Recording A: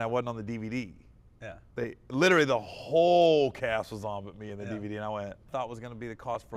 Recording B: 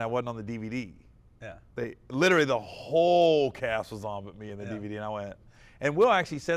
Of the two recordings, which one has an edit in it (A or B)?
A